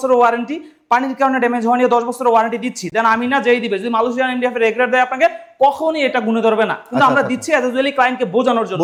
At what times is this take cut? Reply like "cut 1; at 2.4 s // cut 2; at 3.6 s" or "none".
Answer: none